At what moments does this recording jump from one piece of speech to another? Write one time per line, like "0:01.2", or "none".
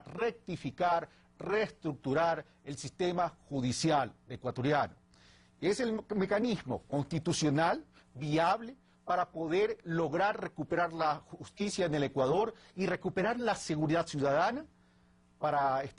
0:11.3

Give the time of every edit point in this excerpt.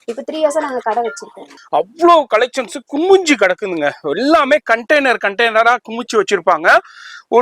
0:01.5

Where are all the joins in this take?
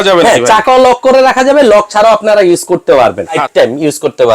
0:03.4

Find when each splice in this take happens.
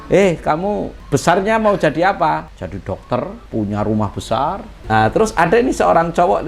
0:00.9
0:02.6
0:03.4
0:04.7

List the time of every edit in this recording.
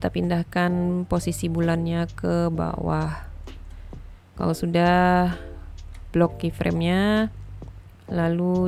none

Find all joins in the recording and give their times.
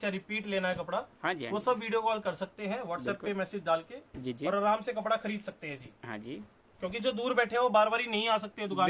none

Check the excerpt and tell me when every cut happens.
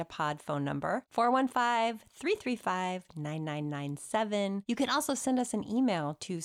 0:04.6

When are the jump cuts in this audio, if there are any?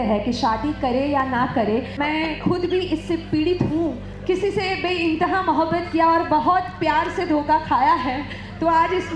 0:01.9
0:04.1

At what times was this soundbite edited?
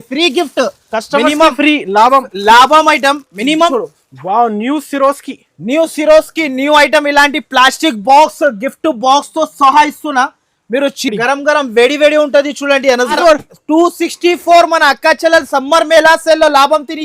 0:03.7
0:13.2

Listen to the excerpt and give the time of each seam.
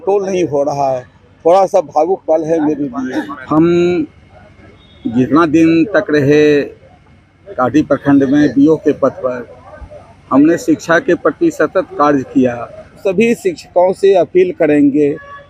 0:03.4
0:13.0

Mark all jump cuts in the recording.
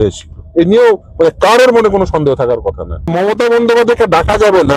0:03.1

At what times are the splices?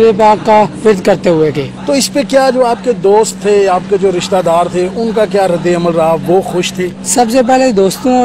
none

